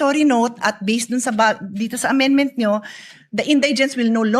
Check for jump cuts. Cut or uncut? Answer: uncut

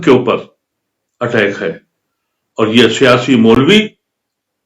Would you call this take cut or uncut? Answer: uncut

